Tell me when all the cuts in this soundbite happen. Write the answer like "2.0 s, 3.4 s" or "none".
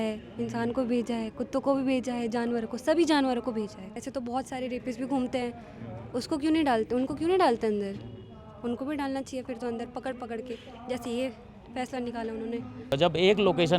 4.0 s, 12.9 s